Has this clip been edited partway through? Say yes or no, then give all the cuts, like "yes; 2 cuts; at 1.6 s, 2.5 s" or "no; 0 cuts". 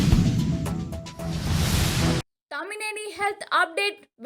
yes; 1 cut; at 2.1 s